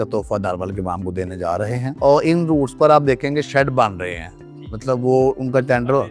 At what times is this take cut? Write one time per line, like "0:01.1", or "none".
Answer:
0:01.8